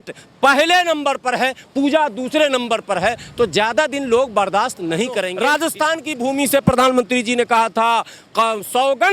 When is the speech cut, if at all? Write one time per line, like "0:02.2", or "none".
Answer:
0:05.3

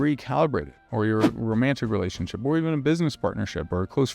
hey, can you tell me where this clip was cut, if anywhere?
none

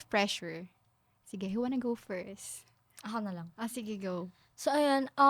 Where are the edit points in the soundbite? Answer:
none

